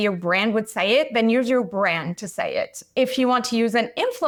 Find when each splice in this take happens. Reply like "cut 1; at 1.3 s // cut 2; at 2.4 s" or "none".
none